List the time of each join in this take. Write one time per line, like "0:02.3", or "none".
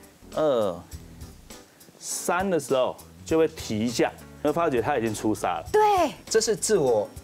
0:04.4
0:06.2